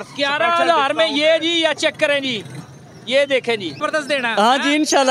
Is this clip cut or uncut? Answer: cut